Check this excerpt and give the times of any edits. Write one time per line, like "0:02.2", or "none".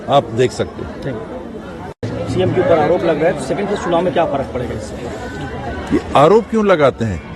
0:01.9

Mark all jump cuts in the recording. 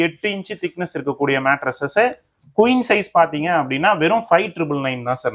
none

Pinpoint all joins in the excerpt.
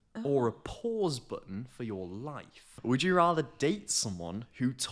0:02.7

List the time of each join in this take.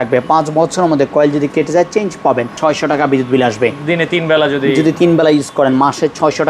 0:02.5

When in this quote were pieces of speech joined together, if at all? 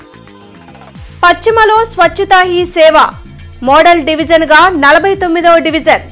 0:00.9

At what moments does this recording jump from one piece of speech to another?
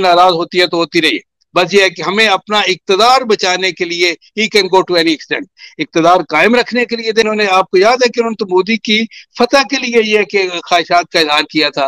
0:07.3

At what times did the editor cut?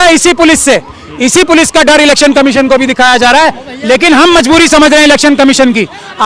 0:03.6

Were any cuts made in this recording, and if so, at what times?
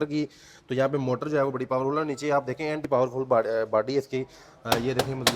0:02.8

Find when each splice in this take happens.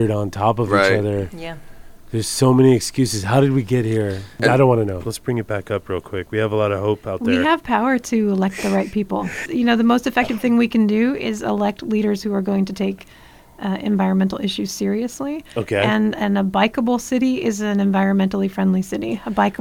0:04.3
0:05.1
0:09.5

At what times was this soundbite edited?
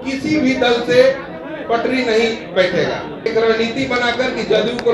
0:03.1

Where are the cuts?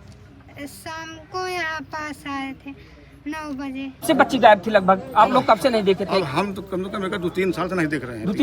0:04.0

